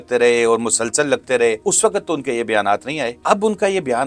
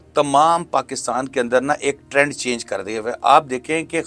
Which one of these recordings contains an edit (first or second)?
first